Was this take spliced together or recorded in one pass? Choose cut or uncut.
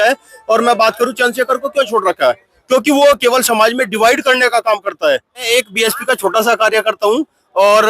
cut